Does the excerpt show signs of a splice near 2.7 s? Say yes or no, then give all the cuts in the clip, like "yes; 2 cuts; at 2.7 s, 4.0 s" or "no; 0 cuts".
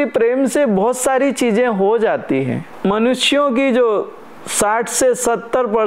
yes; 1 cut; at 2.7 s